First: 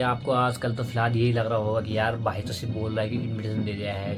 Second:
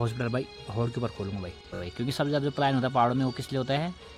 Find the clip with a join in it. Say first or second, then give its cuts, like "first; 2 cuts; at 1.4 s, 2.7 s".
second; 1 cut; at 1.8 s